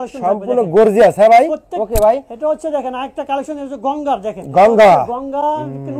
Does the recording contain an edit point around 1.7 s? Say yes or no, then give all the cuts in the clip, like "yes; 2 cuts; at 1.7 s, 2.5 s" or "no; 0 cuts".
yes; 1 cut; at 1.7 s